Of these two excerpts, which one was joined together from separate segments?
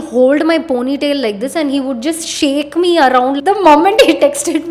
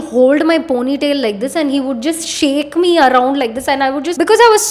first; 1 cut; at 3.4 s

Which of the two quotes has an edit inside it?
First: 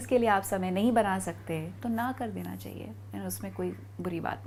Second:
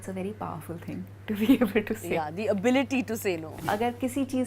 second; 2 cuts; at 2.1 s, 3.5 s

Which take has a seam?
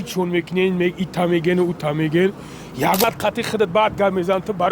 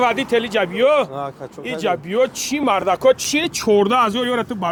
first; 1 cut; at 3.0 s

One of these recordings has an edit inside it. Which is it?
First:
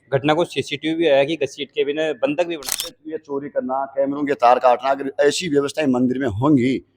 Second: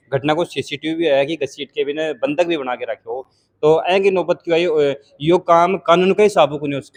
first; 1 cut; at 2.9 s

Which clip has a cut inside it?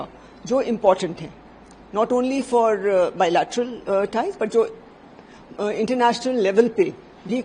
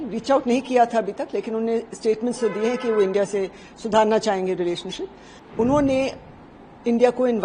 second; 1 cut; at 5.4 s

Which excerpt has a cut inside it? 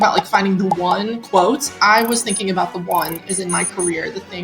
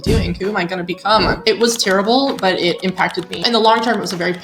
second; 2 cuts; at 1.4 s, 3.4 s

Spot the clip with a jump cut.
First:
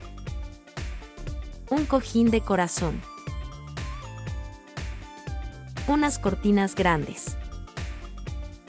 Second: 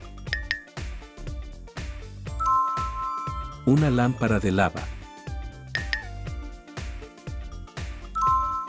first; 4 cuts; at 1.7 s, 3.1 s, 5.3 s, 7.4 s

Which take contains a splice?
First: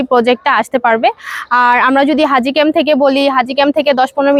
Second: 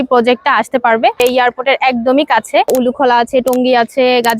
second; 2 cuts; at 1.2 s, 2.7 s

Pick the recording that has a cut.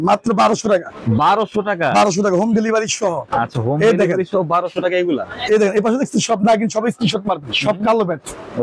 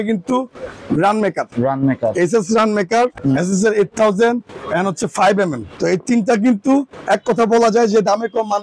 second; 3 cuts; at 3.1 s, 5.7 s, 6.9 s

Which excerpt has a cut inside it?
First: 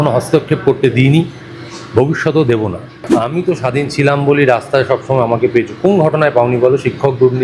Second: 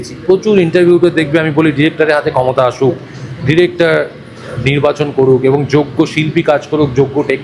first; 1 cut; at 3.1 s

